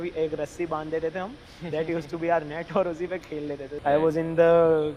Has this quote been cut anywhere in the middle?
yes; 1 cut; at 3.6 s

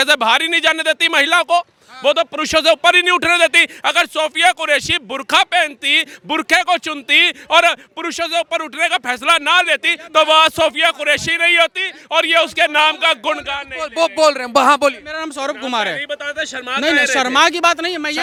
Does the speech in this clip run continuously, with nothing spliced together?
yes; 0 cuts

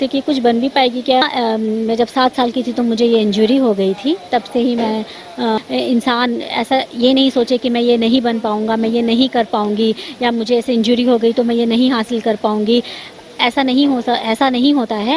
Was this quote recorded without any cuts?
no; 2 cuts; at 1.2 s, 5.6 s

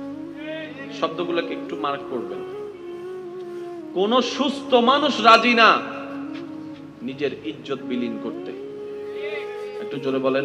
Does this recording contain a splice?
yes; 4 cuts; at 2.7 s, 3.9 s, 5.9 s, 7.0 s

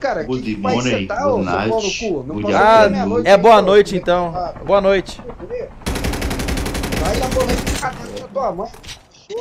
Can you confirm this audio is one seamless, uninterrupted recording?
no; 1 cut; at 6.9 s

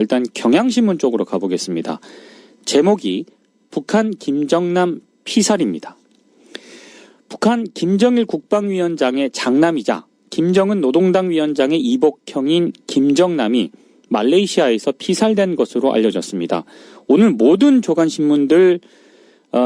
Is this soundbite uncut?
no; 1 cut; at 14.5 s

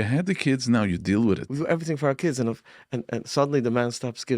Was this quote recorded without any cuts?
no; 1 cut; at 1.5 s

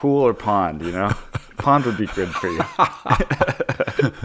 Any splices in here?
no; 0 cuts

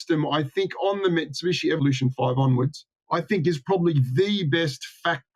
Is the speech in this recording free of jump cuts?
no; 1 cut; at 1.8 s

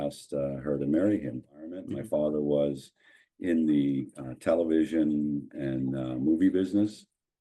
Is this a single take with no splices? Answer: no; 1 cut; at 1.9 s

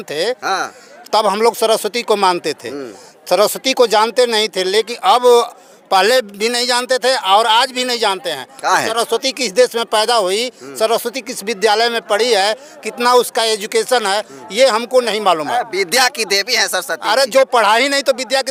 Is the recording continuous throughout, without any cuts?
yes; 0 cuts

